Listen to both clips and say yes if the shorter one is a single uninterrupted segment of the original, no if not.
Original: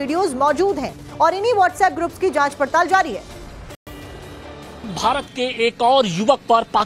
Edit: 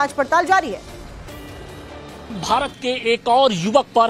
no